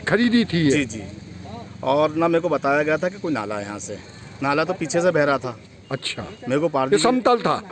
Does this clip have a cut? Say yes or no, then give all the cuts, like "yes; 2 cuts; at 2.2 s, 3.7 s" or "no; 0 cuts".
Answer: no; 0 cuts